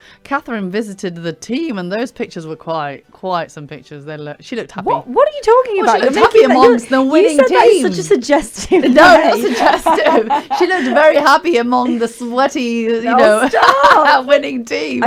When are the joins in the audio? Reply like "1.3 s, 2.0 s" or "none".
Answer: none